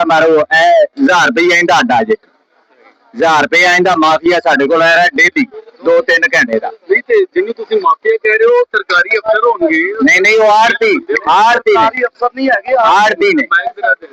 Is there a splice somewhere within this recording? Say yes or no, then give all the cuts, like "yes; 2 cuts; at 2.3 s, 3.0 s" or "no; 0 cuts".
no; 0 cuts